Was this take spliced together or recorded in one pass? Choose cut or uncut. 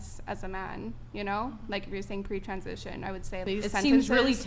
cut